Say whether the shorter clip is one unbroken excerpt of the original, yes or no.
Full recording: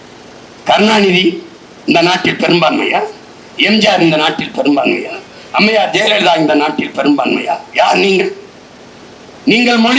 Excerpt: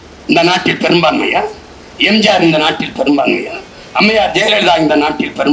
yes